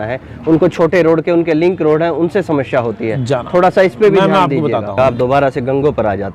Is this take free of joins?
no; 1 cut; at 4.9 s

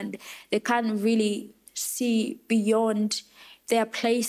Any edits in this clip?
no; 0 cuts

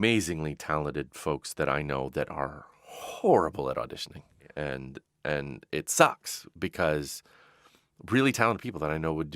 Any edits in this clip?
yes; 1 cut; at 4.5 s

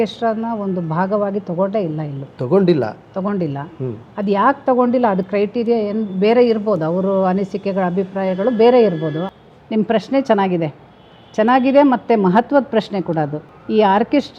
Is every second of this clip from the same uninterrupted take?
no; 2 cuts; at 9.2 s, 13.5 s

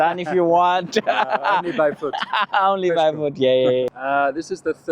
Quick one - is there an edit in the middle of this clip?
yes; 1 cut; at 3.9 s

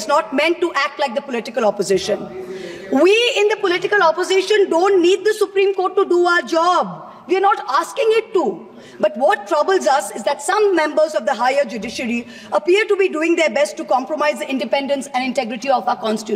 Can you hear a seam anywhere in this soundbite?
no; 0 cuts

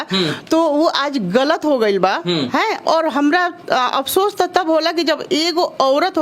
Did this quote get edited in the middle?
no; 0 cuts

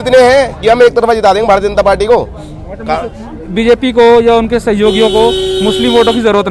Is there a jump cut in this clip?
no; 0 cuts

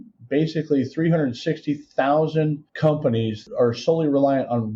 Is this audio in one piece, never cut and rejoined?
no; 1 cut; at 3.4 s

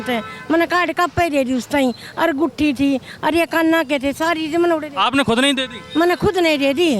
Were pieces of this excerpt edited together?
no; 0 cuts

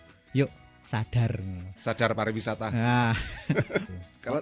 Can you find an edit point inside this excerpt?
no; 0 cuts

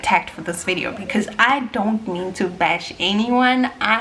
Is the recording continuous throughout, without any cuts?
yes; 0 cuts

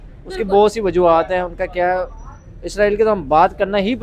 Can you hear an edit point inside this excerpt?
no; 0 cuts

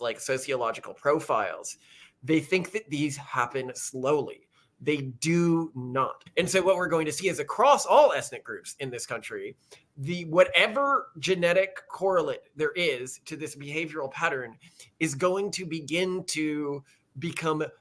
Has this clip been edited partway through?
yes; 1 cut; at 6.2 s

